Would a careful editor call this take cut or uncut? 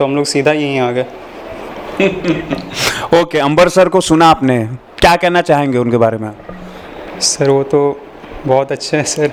uncut